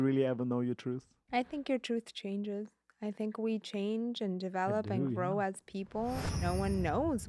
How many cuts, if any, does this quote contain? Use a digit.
2